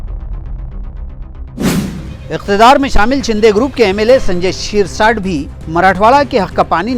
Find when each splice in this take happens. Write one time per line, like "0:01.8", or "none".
0:02.0